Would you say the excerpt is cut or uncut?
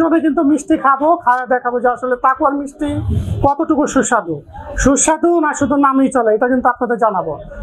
uncut